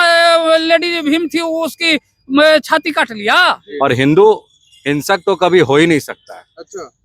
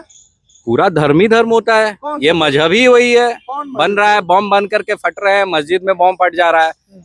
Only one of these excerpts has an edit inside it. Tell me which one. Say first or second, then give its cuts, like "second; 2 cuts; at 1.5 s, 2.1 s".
first; 1 cut; at 3.6 s